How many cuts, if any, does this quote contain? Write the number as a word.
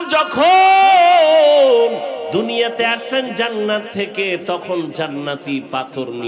one